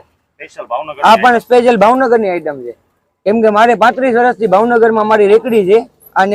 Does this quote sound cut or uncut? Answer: uncut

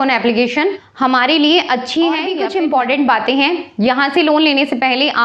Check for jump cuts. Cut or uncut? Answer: cut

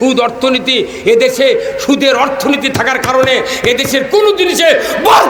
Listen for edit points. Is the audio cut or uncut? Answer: uncut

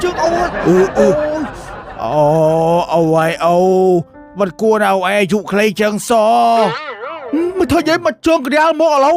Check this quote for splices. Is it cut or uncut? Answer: uncut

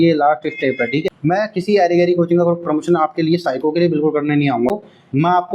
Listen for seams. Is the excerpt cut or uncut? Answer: cut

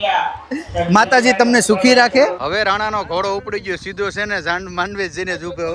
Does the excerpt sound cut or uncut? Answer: cut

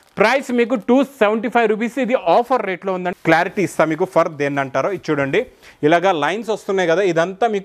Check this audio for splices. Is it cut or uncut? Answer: cut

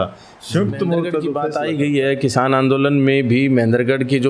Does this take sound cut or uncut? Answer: cut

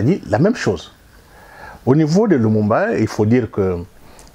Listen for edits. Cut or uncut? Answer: uncut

